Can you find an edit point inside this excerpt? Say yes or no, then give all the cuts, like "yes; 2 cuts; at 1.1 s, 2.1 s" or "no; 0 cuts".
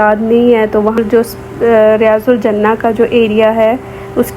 yes; 1 cut; at 1.0 s